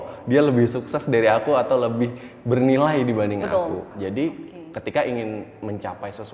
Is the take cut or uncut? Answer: cut